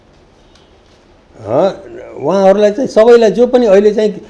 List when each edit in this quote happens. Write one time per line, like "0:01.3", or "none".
none